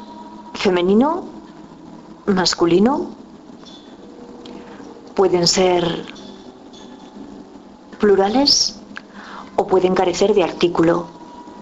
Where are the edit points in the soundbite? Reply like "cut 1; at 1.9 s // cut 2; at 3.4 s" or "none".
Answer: none